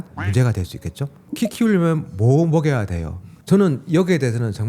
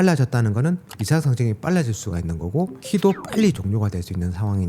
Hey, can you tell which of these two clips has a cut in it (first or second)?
first